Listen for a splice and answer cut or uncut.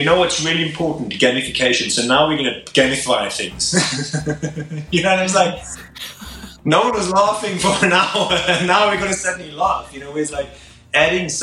uncut